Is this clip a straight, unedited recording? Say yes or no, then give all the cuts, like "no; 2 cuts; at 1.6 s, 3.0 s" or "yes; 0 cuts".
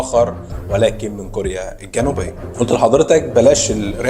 no; 1 cut; at 2.4 s